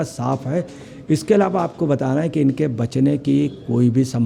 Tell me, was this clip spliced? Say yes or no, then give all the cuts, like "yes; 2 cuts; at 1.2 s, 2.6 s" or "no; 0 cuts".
no; 0 cuts